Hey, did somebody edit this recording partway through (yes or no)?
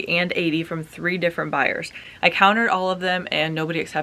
no